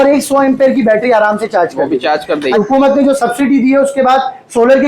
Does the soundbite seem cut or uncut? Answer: cut